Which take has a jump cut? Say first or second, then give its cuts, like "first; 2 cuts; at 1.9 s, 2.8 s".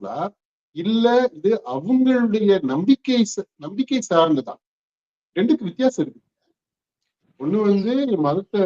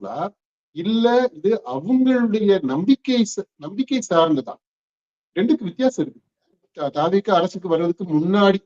second; 1 cut; at 6.8 s